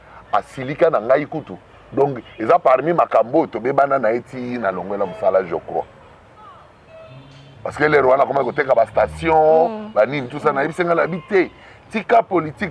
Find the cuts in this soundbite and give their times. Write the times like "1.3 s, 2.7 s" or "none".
none